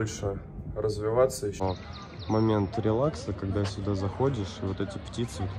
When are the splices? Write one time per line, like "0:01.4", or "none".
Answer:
0:01.6